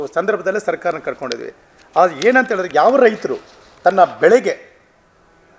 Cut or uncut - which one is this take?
uncut